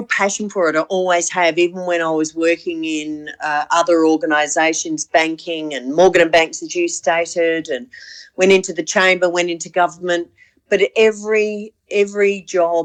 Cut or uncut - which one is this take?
uncut